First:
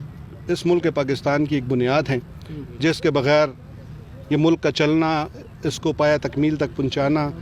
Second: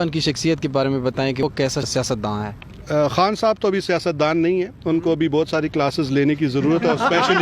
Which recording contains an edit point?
second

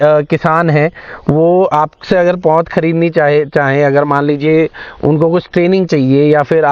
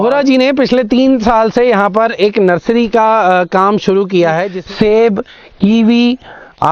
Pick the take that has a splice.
second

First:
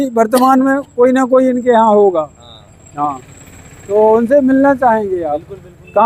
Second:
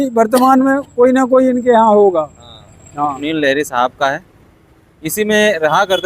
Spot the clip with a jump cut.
second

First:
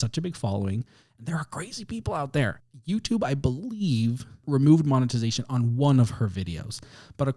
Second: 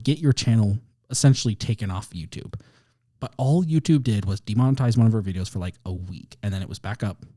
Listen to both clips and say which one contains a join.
first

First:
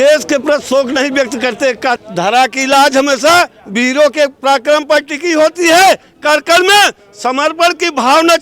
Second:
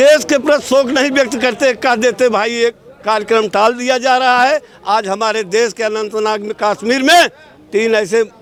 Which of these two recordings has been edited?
first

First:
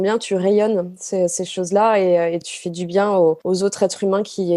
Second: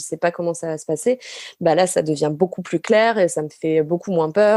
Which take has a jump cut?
first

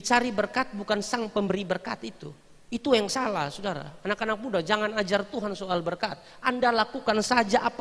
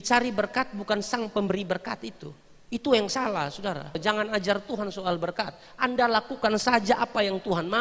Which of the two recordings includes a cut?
second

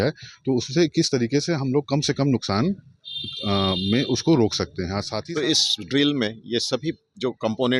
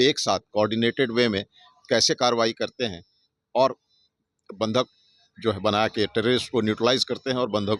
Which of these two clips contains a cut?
first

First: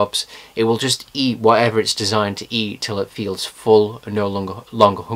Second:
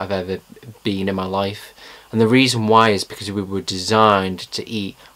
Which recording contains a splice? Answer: second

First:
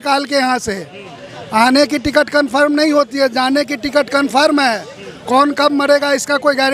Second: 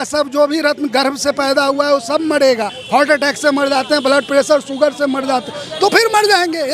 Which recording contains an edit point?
second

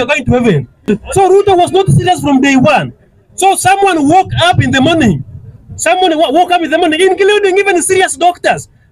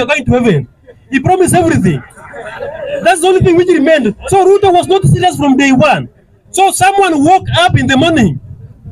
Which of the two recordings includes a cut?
first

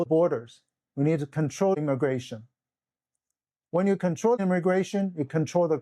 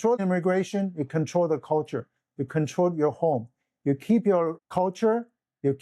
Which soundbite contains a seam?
second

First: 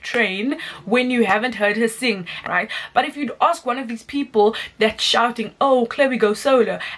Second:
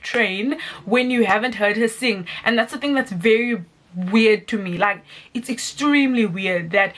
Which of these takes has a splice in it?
first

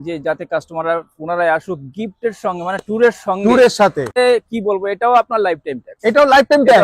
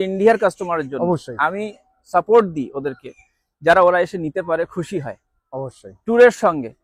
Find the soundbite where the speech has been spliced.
first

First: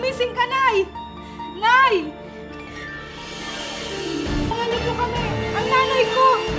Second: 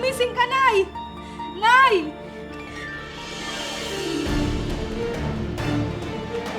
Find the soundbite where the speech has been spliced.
first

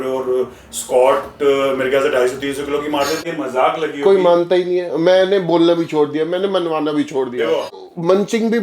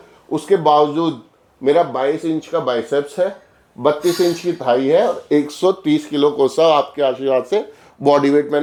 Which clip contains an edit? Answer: first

